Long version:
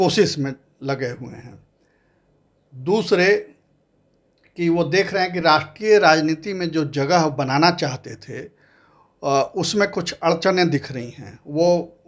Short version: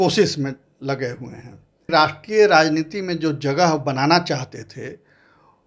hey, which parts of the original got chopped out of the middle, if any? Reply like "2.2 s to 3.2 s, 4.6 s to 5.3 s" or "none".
1.8 s to 5.4 s